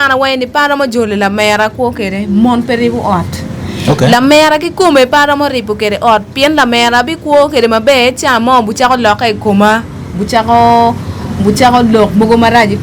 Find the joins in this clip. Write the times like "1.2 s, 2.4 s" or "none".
none